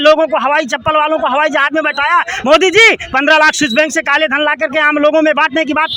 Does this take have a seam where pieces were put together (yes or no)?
no